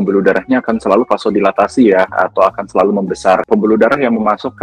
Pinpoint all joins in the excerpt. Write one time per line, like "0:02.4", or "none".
0:03.5